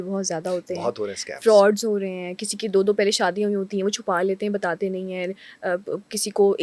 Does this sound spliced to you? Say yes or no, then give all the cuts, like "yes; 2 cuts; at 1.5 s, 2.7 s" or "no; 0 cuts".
no; 0 cuts